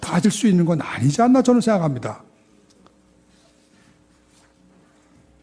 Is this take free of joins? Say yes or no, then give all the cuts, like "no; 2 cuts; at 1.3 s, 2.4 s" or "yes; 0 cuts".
yes; 0 cuts